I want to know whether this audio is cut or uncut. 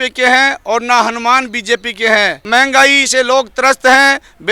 cut